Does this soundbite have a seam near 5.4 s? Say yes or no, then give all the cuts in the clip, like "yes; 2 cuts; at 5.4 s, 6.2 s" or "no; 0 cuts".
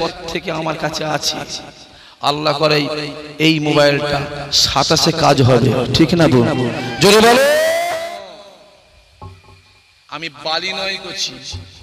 no; 1 cut; at 7.9 s